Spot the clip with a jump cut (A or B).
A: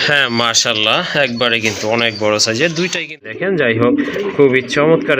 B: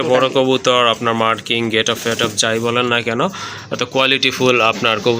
A